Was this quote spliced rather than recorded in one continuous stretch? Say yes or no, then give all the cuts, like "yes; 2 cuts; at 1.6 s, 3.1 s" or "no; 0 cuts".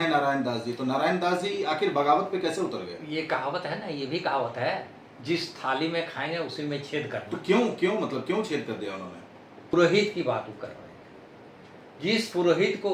yes; 1 cut; at 9.7 s